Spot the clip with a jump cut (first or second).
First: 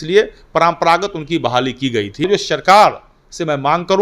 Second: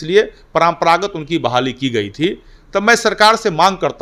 first